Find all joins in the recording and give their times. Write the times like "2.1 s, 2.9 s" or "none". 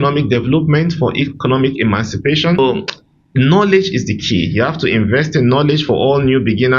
2.6 s